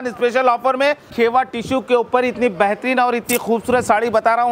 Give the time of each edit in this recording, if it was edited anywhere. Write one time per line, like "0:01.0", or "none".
0:01.1